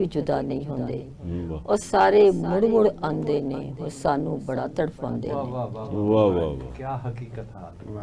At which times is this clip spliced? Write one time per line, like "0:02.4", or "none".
none

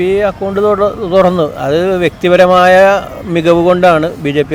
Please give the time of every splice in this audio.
none

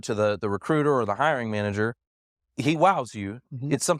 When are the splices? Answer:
none

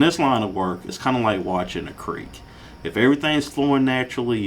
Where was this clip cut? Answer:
0:00.9

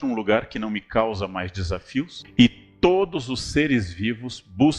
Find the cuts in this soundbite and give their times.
0:02.2

